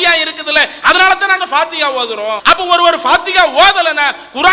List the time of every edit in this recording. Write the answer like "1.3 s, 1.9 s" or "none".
2.4 s